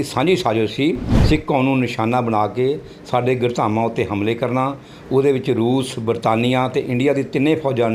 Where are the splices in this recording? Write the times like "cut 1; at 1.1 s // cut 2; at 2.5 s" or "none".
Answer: cut 1; at 1.1 s